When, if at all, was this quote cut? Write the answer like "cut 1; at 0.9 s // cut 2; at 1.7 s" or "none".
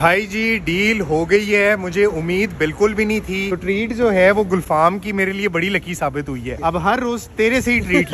cut 1; at 1.9 s // cut 2; at 3.6 s // cut 3; at 6.5 s